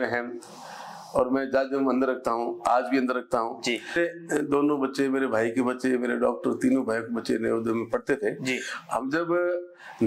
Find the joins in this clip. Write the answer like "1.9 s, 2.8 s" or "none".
3.9 s